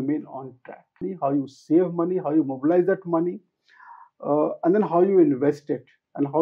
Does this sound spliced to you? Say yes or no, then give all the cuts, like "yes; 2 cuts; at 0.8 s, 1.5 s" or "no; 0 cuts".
yes; 1 cut; at 1.0 s